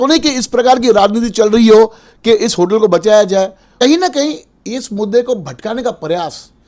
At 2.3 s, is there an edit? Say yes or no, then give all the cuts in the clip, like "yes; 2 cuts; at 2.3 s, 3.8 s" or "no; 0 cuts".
no; 1 cut; at 3.8 s